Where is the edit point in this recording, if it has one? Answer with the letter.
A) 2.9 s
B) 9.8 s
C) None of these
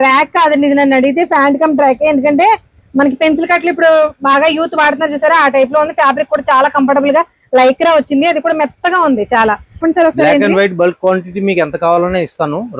B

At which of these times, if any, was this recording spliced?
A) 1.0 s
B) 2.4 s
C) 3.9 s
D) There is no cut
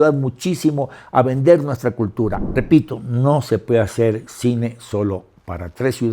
B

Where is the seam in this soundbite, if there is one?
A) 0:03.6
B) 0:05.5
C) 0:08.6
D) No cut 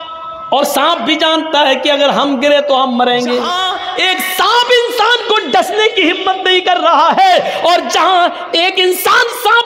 A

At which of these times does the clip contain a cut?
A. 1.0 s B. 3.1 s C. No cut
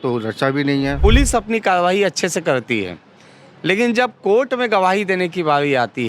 A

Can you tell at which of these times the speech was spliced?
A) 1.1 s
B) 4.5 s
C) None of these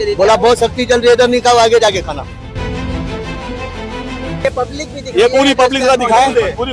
B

